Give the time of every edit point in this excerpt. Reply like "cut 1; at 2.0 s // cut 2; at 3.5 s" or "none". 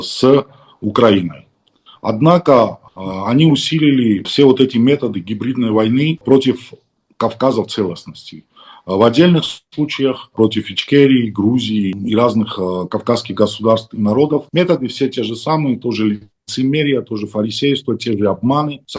cut 1; at 4.3 s // cut 2; at 6.2 s // cut 3; at 10.3 s // cut 4; at 14.5 s